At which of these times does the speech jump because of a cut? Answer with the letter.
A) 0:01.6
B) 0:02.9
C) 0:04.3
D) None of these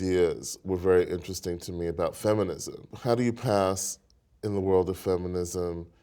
B